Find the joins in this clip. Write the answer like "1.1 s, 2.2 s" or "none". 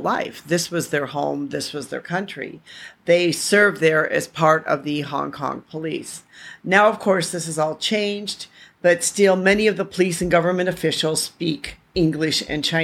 11.9 s

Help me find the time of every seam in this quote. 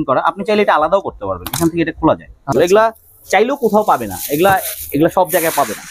2.5 s

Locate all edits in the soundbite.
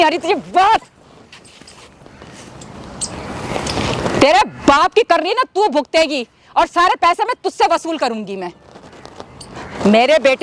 none

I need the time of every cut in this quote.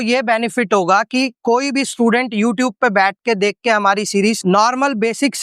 4.4 s

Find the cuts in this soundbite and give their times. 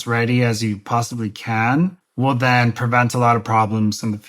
2.0 s

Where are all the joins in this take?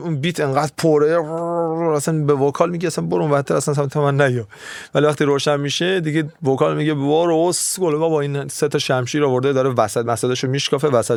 none

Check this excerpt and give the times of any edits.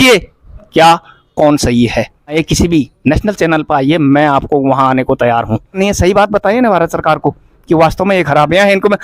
2.4 s, 5.8 s

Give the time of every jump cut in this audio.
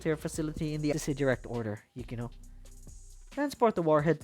0.9 s

